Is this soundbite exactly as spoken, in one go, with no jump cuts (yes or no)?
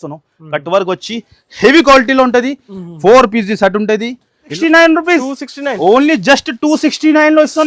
no